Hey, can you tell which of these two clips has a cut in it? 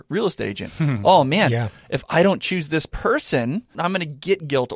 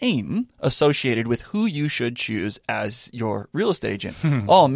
first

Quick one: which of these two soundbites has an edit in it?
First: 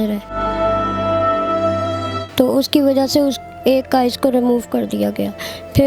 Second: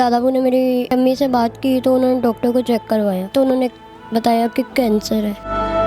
second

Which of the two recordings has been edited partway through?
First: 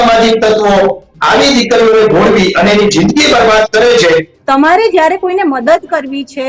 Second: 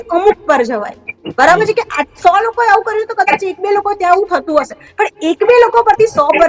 first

